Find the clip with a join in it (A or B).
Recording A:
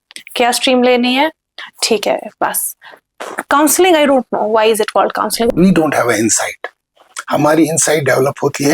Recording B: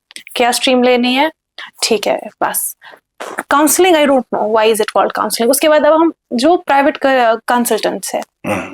A